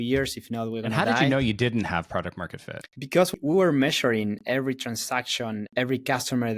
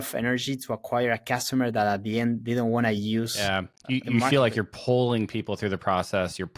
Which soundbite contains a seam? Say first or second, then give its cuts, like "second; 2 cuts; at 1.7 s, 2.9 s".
first; 2 cuts; at 3.4 s, 5.6 s